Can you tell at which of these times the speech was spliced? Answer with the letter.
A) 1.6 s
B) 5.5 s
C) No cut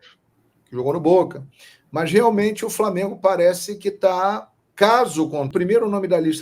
B